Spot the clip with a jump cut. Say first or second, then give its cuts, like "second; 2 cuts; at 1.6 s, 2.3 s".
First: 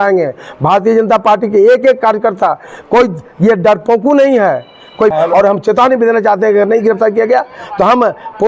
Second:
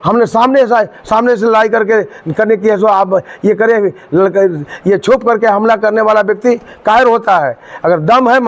first; 1 cut; at 5.1 s